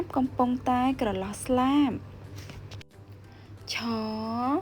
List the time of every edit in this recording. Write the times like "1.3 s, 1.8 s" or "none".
3.0 s